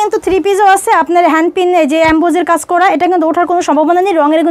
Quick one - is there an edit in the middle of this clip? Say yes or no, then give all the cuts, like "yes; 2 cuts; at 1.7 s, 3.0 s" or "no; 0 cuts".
no; 0 cuts